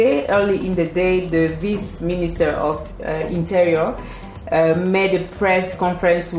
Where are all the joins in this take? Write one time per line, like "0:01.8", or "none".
none